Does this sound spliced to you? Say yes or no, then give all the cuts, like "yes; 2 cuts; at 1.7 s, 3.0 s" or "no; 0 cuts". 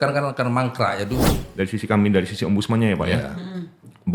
yes; 1 cut; at 1.4 s